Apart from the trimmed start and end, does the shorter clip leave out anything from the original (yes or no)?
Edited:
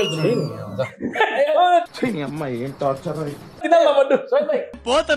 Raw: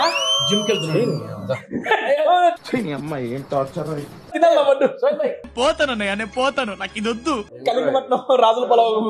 no